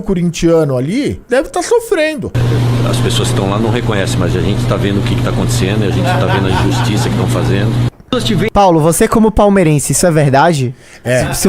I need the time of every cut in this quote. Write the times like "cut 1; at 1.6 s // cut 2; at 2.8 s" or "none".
cut 1; at 1.2 s // cut 2; at 2.4 s